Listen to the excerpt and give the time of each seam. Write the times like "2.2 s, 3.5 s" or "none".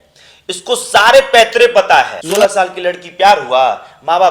2.2 s